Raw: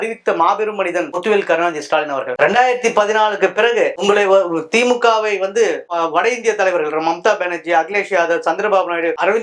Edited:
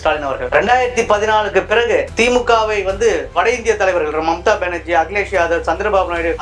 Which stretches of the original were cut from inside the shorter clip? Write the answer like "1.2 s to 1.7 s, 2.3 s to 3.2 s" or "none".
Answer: 4.0 s to 4.6 s, 5.9 s to 6.1 s

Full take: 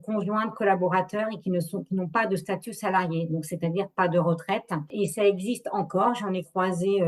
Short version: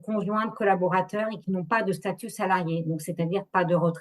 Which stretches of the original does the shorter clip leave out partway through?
1.4 s to 1.8 s

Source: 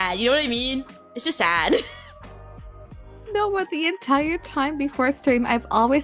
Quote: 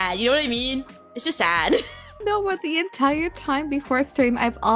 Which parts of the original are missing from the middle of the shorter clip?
2.0 s to 3.1 s

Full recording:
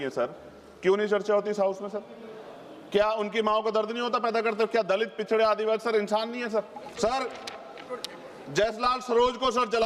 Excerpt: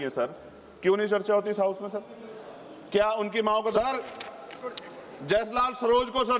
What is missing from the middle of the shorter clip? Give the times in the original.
3.7 s to 7.0 s

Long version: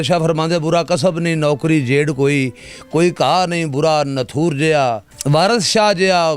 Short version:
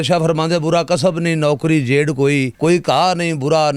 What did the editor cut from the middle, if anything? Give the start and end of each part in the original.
2.5 s to 2.8 s

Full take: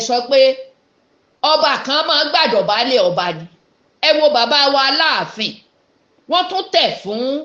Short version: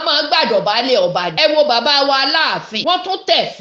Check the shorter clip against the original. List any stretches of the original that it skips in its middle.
3.3 s to 4.0 s, 5.4 s to 6.2 s

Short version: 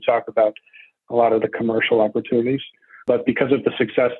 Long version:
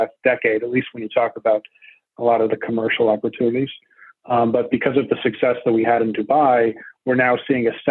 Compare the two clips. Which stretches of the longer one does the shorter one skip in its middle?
4.1 s to 4.5 s

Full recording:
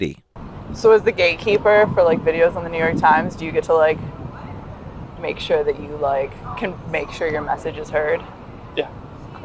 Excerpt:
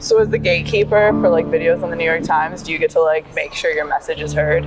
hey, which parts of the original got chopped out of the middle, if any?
4.1 s to 7.0 s

